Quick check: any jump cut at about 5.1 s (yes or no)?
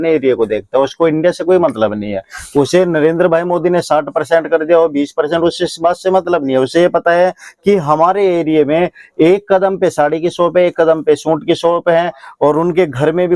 no